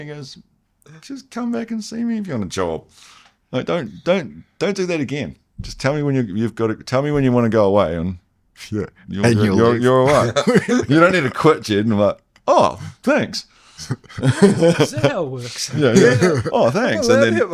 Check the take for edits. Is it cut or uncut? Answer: uncut